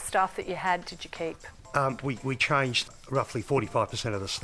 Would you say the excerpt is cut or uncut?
cut